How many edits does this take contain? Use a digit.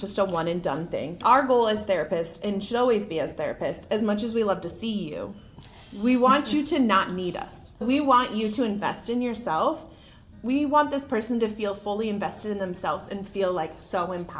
3